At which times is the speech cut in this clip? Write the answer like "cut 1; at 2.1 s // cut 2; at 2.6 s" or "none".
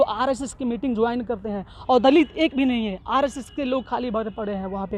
none